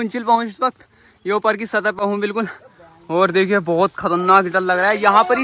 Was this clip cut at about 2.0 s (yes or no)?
no